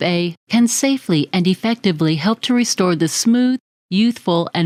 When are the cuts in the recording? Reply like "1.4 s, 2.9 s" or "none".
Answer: none